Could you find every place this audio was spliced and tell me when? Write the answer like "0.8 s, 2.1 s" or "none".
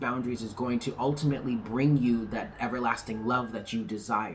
none